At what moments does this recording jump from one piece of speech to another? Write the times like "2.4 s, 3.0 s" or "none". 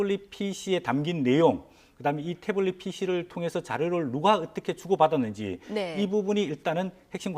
4.0 s